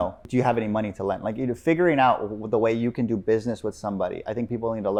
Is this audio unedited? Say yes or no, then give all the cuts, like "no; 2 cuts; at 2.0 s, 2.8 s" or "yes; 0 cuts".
yes; 0 cuts